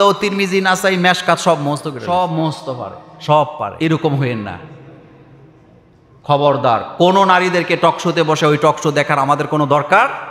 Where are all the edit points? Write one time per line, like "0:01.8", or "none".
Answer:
0:02.0
0:03.7